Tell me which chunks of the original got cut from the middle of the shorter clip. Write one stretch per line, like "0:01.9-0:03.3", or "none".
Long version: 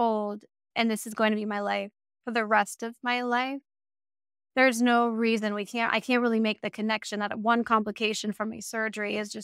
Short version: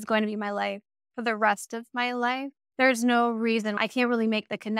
0:03.7-0:04.4
0:05.5-0:05.9